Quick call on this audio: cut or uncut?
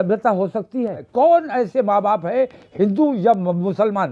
cut